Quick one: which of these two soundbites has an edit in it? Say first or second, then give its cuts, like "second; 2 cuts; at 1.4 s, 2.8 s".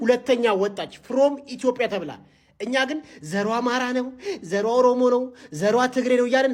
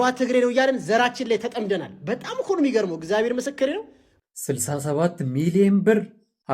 second; 1 cut; at 4.0 s